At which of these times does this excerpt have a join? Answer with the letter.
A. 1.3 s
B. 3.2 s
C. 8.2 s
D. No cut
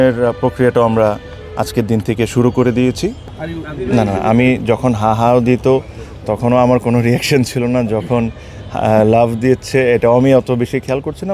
B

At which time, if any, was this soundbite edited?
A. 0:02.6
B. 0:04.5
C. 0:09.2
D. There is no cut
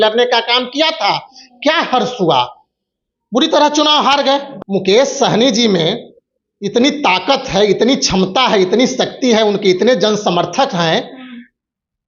B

